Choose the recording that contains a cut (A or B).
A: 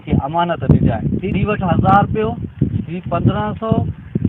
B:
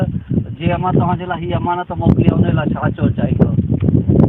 A